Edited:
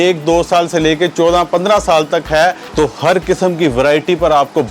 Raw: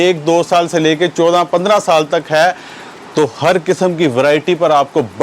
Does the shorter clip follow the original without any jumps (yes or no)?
no